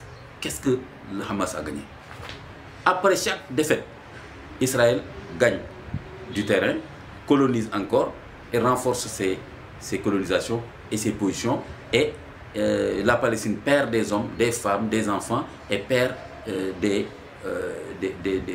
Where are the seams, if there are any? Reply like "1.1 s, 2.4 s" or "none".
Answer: none